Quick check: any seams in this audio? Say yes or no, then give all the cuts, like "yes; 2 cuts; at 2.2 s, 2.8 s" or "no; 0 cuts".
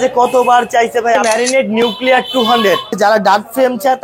yes; 2 cuts; at 1.2 s, 2.9 s